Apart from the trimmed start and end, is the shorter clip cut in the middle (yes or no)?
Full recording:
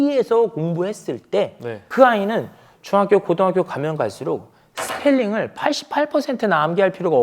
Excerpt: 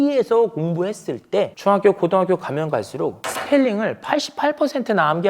yes